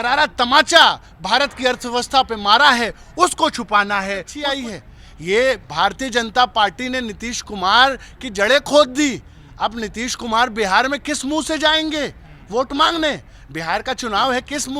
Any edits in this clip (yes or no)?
yes